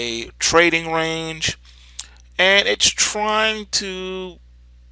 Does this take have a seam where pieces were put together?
yes; 1 cut; at 3.4 s

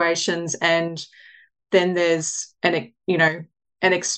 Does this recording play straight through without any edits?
yes; 0 cuts

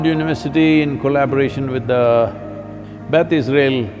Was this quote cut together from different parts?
no; 0 cuts

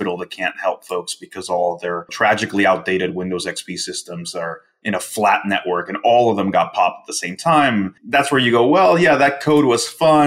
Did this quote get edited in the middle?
yes; 2 cuts; at 2.1 s, 8.0 s

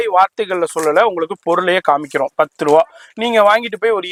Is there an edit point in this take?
no; 0 cuts

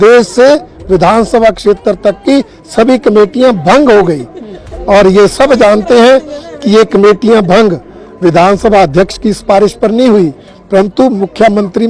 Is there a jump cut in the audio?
no; 0 cuts

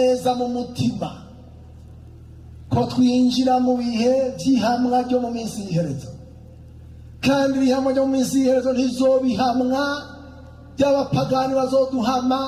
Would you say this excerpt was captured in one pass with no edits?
yes; 0 cuts

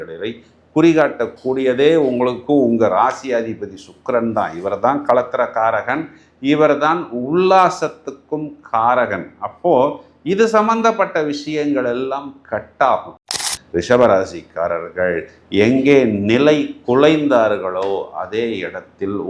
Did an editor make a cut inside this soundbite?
yes; 1 cut; at 13.1 s

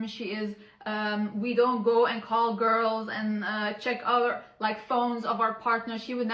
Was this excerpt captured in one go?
yes; 0 cuts

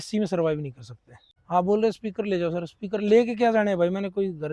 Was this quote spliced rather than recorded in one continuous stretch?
yes; 1 cut; at 1.3 s

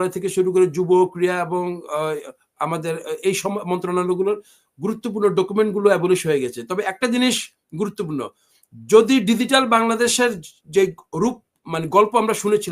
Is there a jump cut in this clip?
no; 0 cuts

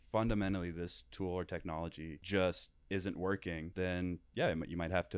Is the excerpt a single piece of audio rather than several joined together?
no; 3 cuts; at 2.2 s, 2.7 s, 3.7 s

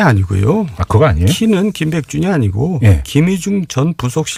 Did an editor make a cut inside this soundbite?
no; 0 cuts

